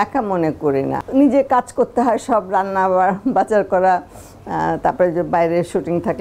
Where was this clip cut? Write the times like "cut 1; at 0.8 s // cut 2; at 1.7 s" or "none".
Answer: cut 1; at 1.0 s